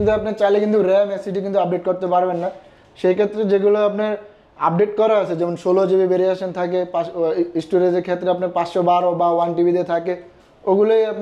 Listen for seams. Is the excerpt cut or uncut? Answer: uncut